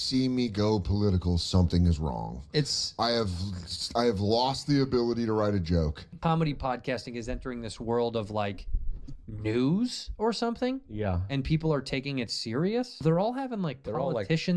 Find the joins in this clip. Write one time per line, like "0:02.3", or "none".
0:06.1

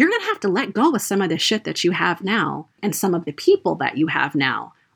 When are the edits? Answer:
0:02.8

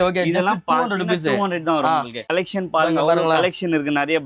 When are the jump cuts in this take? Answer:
0:02.2

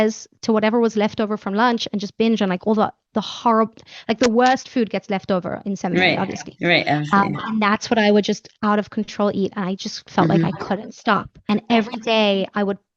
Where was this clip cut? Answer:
0:11.5

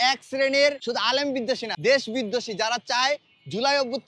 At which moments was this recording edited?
0:01.3

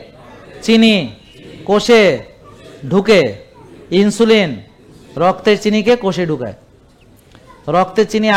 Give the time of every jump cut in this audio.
none

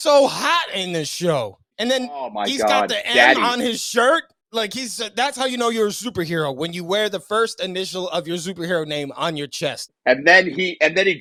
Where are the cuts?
none

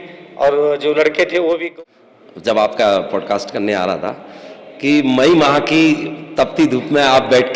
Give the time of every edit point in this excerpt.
0:01.7

